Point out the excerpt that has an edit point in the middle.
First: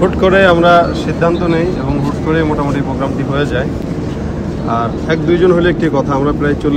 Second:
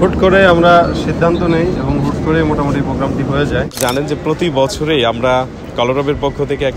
second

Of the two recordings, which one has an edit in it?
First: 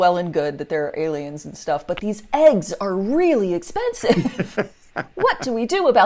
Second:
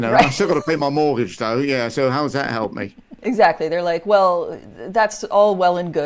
second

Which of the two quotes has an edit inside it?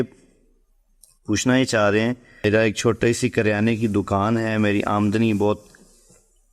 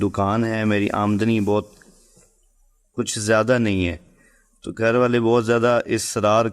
first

